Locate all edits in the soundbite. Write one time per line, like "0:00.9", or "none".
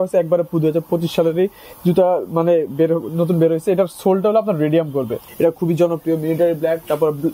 0:05.2